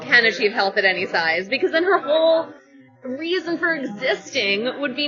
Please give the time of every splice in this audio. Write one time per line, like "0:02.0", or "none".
none